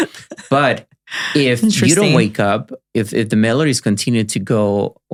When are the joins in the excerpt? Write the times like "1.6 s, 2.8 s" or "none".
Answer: none